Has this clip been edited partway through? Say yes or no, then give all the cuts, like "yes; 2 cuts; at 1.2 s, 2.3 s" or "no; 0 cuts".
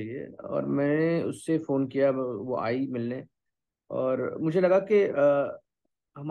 no; 0 cuts